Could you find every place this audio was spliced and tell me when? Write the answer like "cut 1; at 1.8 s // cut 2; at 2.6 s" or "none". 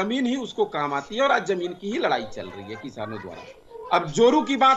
cut 1; at 3.6 s